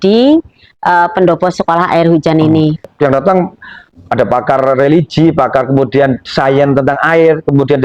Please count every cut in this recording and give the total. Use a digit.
1